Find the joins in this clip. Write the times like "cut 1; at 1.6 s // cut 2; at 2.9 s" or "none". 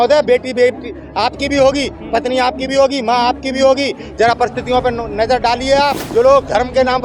cut 1; at 6.1 s

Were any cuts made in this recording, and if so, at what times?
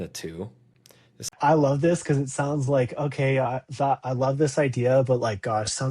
cut 1; at 1.3 s

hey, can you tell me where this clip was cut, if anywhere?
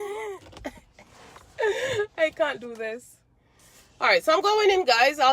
none

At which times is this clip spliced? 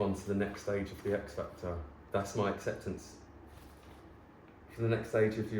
cut 1; at 1.9 s

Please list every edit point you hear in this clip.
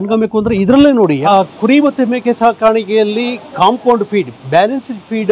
none

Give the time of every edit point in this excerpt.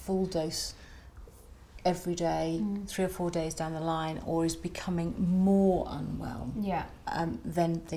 none

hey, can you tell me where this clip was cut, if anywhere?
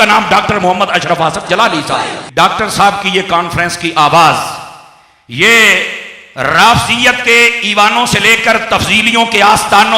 cut 1; at 2.2 s

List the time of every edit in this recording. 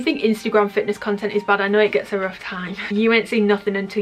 cut 1; at 2.8 s

